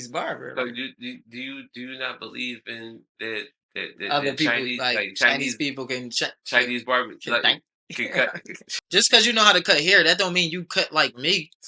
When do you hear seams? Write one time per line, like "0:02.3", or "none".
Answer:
0:08.9